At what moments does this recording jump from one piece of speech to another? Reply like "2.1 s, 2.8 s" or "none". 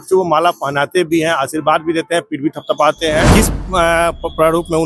3.3 s